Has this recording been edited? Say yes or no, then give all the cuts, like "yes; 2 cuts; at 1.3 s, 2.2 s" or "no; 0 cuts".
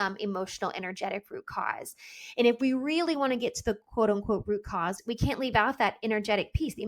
yes; 1 cut; at 5.0 s